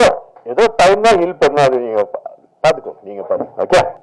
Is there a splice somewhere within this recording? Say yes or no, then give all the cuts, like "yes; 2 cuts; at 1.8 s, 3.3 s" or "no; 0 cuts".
no; 0 cuts